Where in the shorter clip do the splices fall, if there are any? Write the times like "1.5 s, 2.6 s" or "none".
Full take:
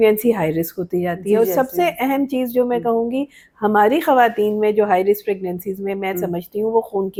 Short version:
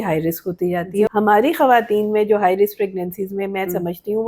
1.1 s